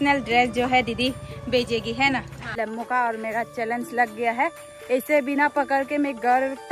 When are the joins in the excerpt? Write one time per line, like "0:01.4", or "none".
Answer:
0:02.4